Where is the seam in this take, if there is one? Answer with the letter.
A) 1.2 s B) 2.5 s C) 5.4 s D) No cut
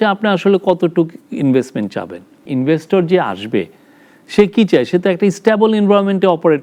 B